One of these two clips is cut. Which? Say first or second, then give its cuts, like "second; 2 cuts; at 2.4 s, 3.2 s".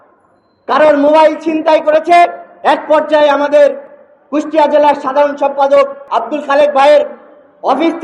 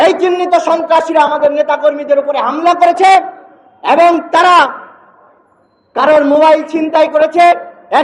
first; 1 cut; at 6.0 s